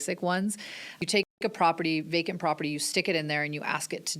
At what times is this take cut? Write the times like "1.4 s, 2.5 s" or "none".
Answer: 1.0 s